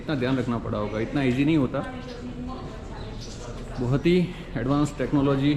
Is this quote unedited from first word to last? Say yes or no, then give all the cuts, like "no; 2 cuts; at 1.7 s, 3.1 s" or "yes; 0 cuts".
yes; 0 cuts